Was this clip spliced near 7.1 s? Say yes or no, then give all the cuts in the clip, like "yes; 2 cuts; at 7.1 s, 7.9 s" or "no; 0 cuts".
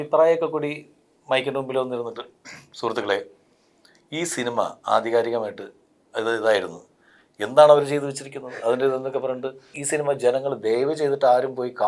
no; 1 cut; at 9.8 s